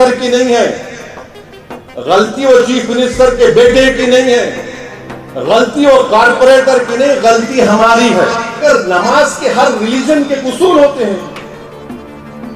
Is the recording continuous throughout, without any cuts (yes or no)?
no